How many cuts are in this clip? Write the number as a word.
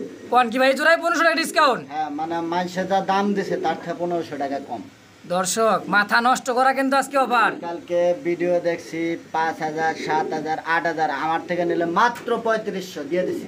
zero